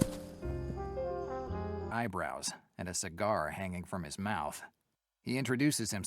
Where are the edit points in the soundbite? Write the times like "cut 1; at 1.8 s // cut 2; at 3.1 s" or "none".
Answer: cut 1; at 1.9 s